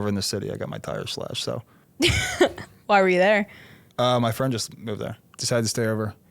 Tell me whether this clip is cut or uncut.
cut